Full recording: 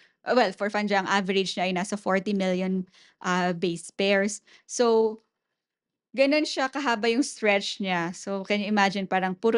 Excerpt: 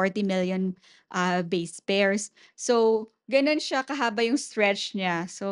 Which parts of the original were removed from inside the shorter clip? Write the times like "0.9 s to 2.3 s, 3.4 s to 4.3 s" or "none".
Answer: 5.3 s to 6.0 s